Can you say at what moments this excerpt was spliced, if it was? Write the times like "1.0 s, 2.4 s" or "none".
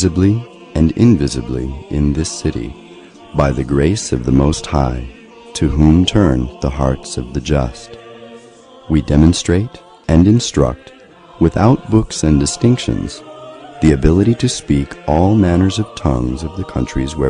none